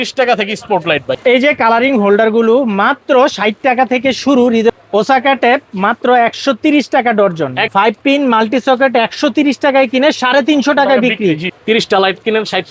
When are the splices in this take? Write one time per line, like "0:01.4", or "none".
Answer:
0:01.1
0:04.8
0:07.6
0:11.5